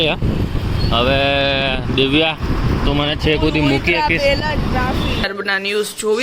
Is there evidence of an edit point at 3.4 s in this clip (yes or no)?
no